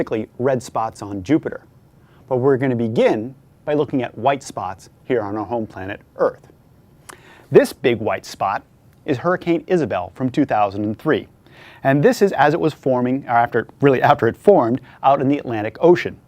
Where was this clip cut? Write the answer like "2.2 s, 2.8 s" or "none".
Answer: 13.9 s